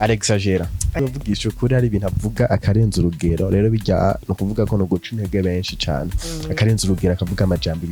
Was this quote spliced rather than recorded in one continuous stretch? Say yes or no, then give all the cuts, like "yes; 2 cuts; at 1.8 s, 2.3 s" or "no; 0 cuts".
yes; 1 cut; at 1.0 s